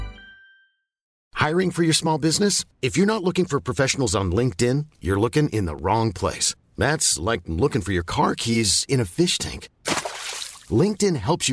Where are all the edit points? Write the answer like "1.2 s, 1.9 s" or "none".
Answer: 1.2 s